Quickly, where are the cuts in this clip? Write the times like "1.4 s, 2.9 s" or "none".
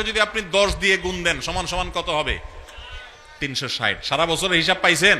none